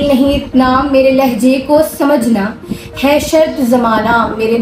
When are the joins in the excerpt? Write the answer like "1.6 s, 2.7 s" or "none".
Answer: none